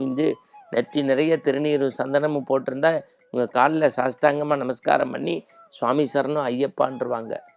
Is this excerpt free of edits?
yes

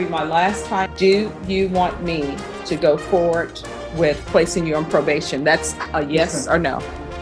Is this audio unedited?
no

